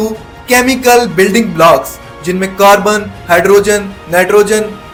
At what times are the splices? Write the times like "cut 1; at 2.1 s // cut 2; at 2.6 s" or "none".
none